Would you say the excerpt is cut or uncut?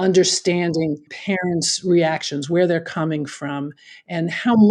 cut